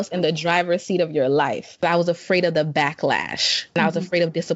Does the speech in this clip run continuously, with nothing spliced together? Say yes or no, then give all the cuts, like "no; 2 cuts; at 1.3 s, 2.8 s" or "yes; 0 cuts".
no; 2 cuts; at 1.8 s, 3.8 s